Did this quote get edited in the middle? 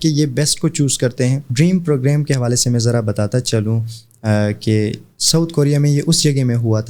yes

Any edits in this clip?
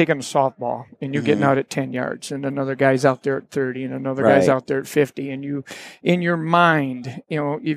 no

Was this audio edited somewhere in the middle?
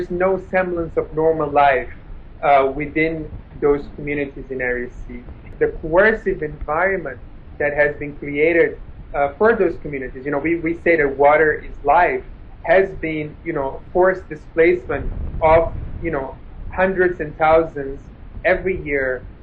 yes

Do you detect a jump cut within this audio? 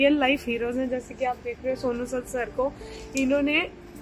no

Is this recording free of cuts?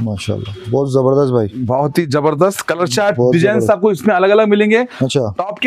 yes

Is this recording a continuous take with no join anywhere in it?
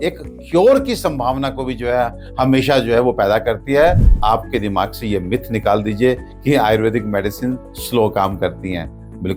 no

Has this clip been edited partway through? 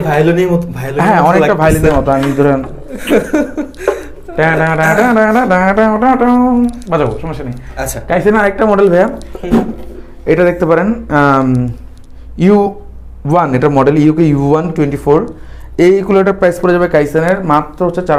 no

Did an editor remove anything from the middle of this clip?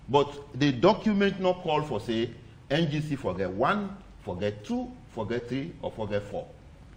no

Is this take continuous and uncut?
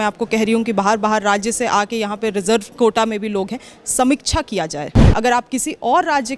no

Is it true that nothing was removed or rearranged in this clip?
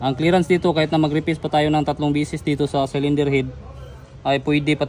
yes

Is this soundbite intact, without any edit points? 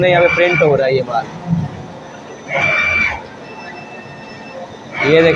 yes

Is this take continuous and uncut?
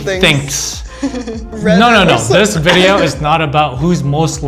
no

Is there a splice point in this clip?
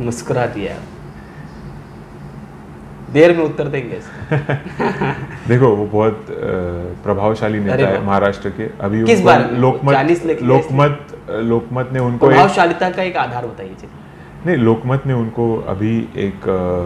no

